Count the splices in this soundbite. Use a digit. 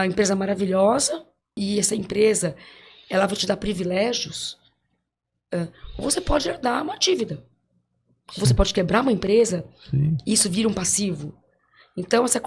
1